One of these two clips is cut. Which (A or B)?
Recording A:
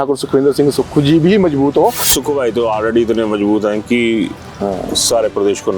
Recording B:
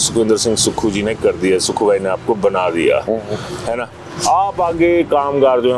A